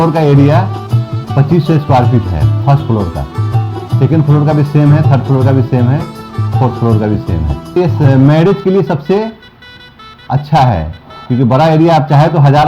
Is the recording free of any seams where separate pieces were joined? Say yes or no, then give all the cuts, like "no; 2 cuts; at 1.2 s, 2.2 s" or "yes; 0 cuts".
yes; 0 cuts